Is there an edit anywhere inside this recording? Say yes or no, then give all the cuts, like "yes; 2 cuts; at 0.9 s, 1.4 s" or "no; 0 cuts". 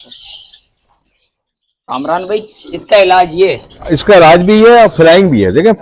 no; 0 cuts